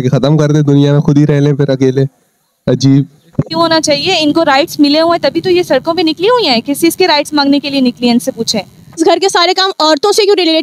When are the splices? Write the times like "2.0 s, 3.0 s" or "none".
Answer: 3.5 s, 9.0 s